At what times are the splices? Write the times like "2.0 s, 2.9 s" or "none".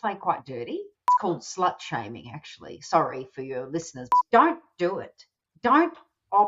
1.2 s, 4.0 s